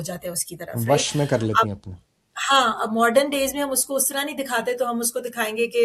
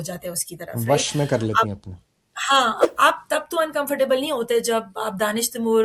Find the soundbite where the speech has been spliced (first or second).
second